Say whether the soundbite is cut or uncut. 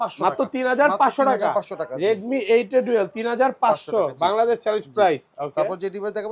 uncut